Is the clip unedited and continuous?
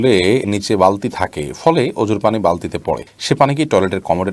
yes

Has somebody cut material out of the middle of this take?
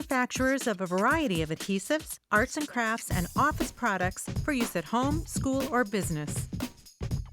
yes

